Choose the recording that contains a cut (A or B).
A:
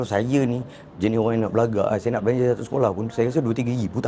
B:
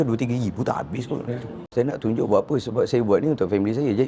B